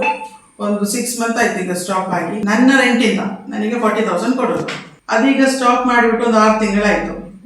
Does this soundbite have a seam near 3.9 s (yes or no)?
no